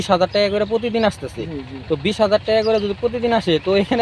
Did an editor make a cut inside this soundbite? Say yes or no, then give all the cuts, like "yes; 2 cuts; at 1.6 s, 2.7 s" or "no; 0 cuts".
no; 0 cuts